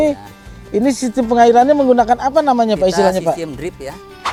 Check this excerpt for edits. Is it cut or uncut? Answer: uncut